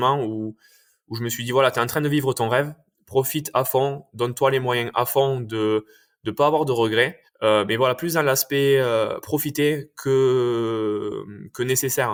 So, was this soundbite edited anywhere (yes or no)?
no